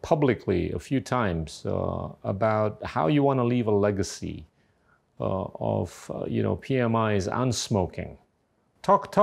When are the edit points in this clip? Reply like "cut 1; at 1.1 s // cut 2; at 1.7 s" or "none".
none